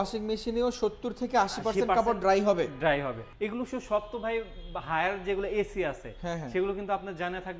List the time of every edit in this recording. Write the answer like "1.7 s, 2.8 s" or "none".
3.2 s